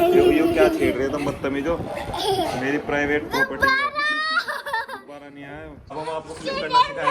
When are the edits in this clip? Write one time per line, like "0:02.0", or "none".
0:05.9